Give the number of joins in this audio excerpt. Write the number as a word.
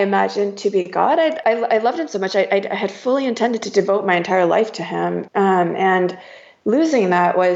one